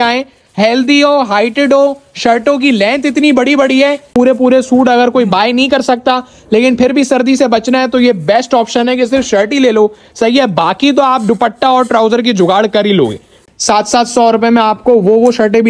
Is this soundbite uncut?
no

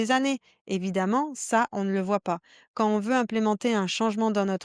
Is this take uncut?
yes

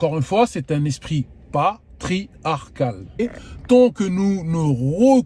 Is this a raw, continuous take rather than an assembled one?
no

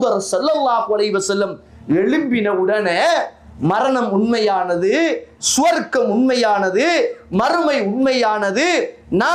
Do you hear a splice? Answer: no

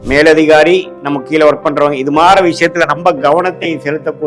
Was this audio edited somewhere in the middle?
yes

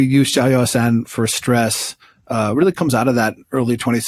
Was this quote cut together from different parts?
no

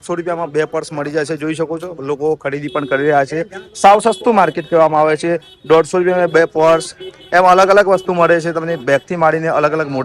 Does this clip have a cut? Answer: no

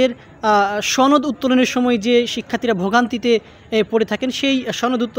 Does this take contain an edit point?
no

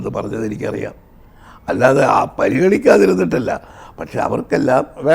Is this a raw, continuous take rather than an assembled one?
yes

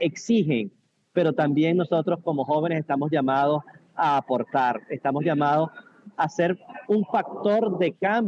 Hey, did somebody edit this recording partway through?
no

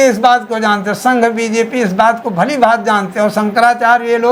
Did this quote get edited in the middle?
no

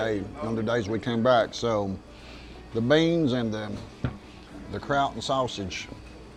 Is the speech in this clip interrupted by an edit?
no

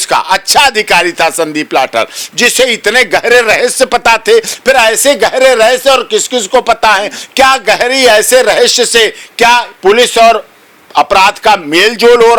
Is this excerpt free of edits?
yes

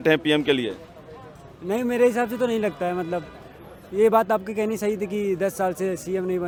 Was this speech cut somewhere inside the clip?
no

